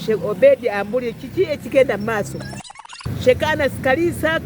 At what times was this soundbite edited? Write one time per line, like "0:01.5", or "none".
0:02.8